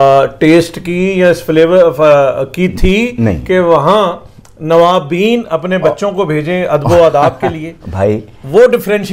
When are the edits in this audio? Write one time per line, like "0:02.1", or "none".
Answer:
none

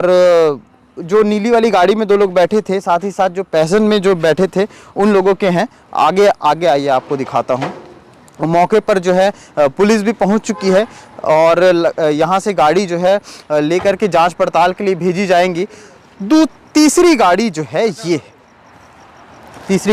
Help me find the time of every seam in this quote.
none

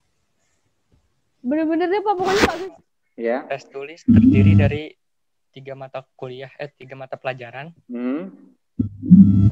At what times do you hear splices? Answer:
0:02.5

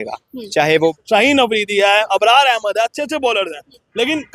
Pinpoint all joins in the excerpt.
0:00.9

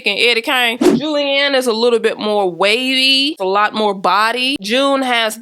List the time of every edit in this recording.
0:01.1

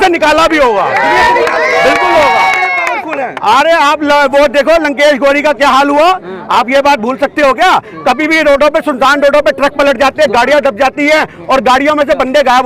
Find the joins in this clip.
none

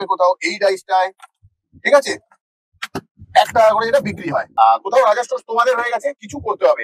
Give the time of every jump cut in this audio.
0:04.4

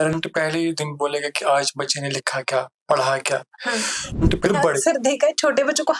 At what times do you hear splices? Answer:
0:04.4

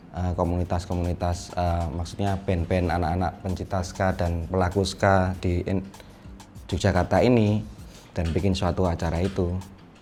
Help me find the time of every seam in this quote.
none

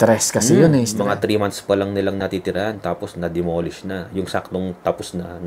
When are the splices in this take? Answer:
0:01.0

